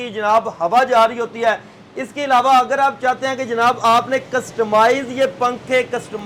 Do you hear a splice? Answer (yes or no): no